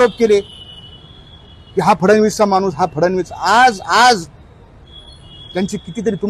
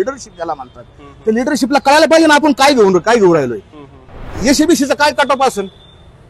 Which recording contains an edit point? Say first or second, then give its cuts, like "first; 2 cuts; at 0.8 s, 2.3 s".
second; 1 cut; at 4.3 s